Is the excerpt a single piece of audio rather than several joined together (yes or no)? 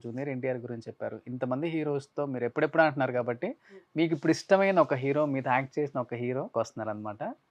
no